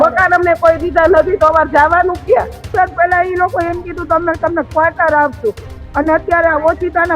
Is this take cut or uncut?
cut